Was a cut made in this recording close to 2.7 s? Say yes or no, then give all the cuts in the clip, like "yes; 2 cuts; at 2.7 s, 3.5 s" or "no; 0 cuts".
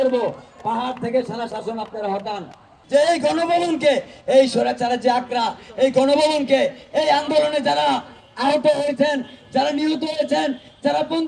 yes; 1 cut; at 2.7 s